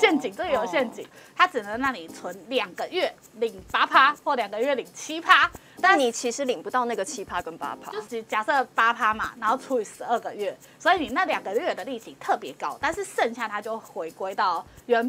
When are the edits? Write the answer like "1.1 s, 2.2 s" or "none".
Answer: 7.8 s